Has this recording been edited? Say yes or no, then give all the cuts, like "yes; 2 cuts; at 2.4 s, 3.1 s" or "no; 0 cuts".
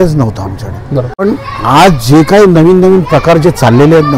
yes; 1 cut; at 1.2 s